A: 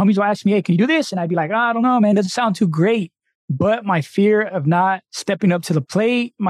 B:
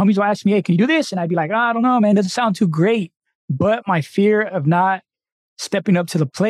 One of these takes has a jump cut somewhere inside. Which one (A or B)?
A